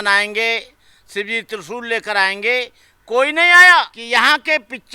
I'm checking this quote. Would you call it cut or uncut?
cut